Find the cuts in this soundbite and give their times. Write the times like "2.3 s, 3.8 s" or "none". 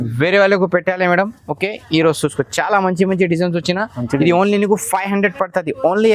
none